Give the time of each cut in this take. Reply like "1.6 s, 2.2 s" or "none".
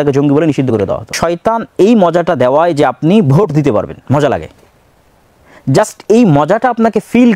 1.1 s